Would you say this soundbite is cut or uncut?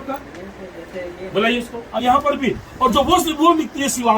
cut